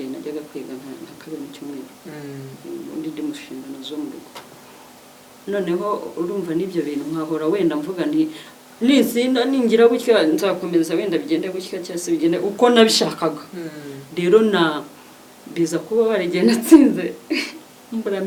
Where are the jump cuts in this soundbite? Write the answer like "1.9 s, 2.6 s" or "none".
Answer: none